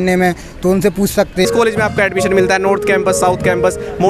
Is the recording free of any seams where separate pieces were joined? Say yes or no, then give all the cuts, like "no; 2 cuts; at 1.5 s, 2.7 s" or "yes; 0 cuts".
no; 1 cut; at 1.5 s